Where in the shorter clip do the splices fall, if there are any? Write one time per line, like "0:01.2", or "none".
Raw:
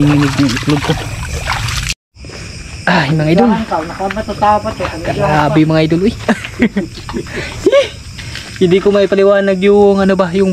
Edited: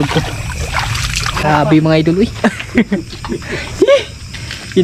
0:01.4